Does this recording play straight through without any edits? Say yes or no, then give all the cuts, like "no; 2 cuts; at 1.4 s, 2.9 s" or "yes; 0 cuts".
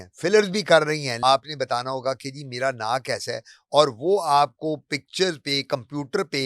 no; 1 cut; at 1.1 s